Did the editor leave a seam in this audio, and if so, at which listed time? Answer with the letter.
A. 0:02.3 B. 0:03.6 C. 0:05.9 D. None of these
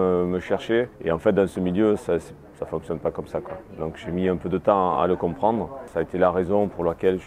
C